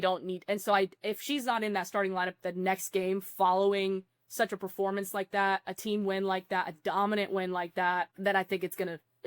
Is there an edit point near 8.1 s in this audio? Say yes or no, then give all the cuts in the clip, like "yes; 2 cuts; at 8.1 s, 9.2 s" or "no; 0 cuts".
yes; 1 cut; at 8.1 s